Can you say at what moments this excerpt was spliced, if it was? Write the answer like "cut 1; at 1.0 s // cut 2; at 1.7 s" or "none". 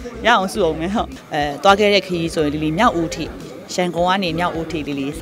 cut 1; at 1.2 s